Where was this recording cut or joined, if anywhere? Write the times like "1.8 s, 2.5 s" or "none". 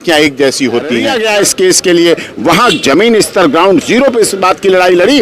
1.1 s